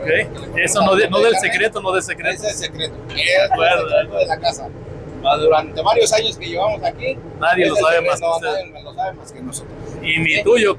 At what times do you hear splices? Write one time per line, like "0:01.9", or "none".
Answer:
none